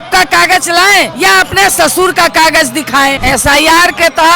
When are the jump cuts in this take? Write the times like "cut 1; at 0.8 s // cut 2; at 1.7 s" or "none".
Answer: cut 1; at 1.1 s // cut 2; at 3.2 s